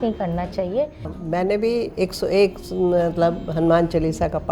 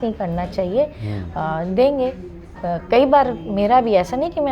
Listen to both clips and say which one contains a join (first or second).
first